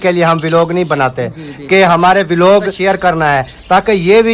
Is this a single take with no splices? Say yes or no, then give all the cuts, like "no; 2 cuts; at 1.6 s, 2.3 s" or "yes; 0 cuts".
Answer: no; 1 cut; at 2.8 s